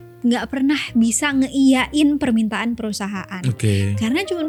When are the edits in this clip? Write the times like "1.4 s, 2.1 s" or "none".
none